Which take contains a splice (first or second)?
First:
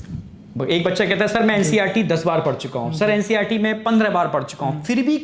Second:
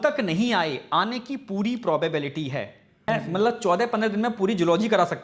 second